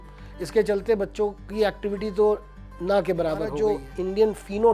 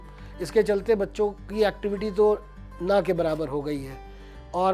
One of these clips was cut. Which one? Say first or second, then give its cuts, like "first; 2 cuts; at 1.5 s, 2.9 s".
first; 1 cut; at 3.5 s